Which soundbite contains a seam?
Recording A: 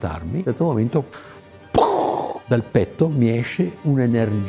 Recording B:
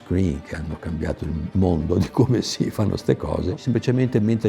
B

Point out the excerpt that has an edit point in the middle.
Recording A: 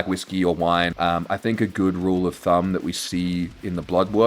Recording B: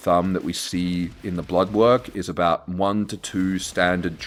A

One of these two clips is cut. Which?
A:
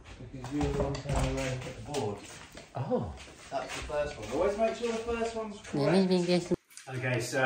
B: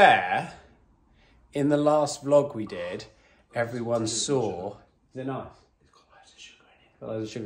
A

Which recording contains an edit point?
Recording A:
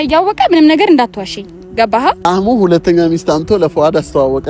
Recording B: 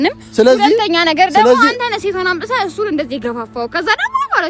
A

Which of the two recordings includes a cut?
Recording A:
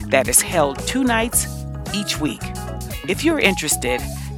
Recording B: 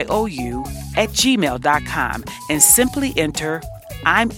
A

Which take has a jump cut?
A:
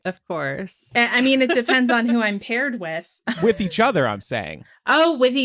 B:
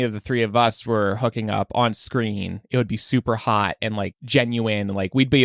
A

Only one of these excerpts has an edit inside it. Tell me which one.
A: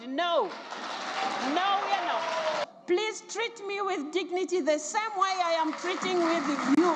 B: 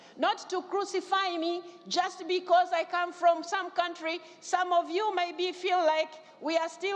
A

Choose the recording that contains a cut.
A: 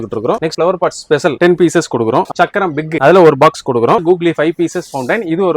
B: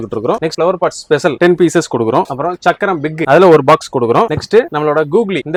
A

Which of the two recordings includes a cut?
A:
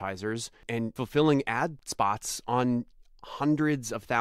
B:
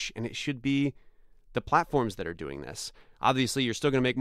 A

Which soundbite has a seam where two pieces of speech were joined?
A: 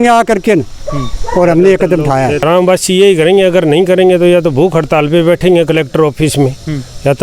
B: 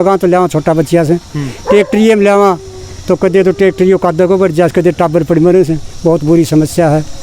A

